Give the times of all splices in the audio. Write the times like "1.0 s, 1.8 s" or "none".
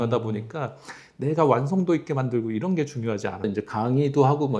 3.4 s